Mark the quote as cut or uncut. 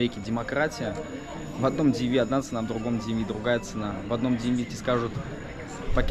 uncut